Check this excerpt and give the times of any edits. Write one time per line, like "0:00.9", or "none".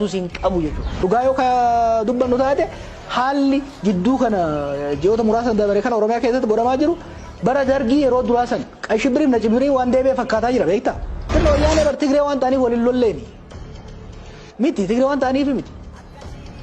0:00.9
0:11.2

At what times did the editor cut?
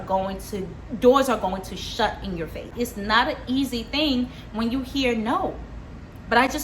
0:02.7

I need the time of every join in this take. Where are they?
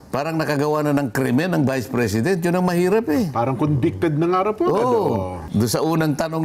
0:05.4

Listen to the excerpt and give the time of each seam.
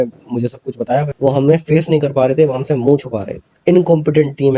0:01.1

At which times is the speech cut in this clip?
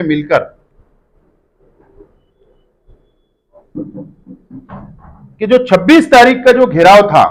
none

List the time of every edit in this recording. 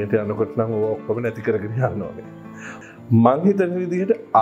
0:02.7

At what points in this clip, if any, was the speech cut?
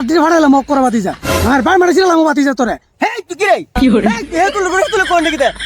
0:02.9

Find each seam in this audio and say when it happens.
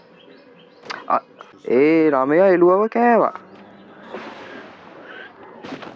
0:01.4

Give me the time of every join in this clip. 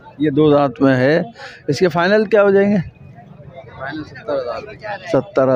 none

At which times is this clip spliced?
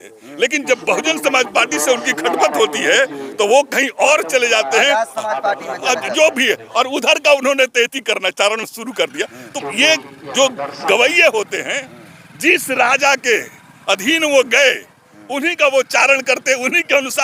none

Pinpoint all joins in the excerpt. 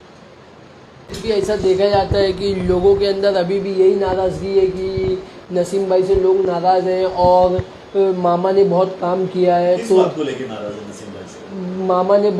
0:01.1

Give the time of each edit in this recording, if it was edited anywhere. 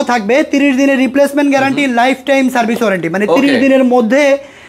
none

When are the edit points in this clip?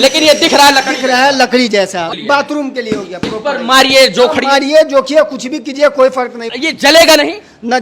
0:02.1
0:06.5

